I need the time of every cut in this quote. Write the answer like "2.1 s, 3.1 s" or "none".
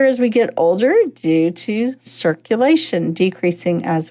none

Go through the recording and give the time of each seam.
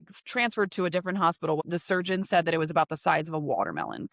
1.6 s

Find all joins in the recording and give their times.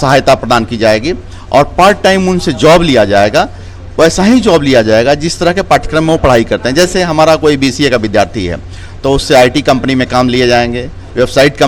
none

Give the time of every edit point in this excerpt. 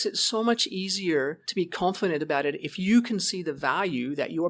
1.4 s

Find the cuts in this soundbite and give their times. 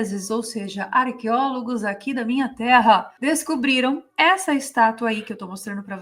none

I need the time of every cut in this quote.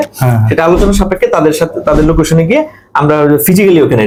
none

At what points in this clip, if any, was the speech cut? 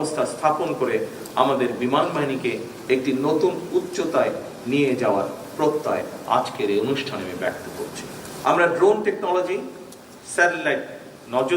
8.4 s

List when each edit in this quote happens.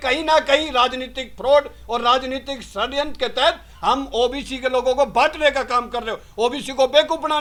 none

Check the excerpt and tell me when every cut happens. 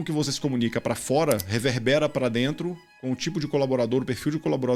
none

